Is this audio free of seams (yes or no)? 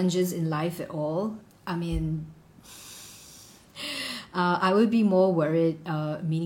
no